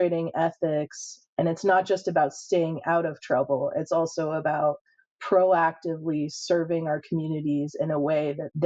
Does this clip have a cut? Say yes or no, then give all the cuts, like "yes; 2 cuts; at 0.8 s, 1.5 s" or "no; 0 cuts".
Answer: no; 0 cuts